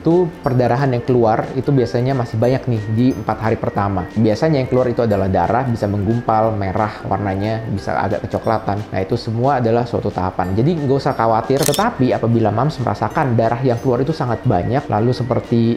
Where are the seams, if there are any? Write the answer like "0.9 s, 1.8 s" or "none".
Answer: 11.7 s